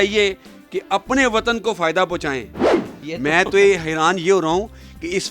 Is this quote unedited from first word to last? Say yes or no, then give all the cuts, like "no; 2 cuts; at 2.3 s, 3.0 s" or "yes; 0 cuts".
no; 1 cut; at 2.8 s